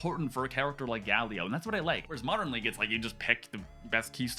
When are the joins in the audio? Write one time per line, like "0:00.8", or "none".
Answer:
0:02.0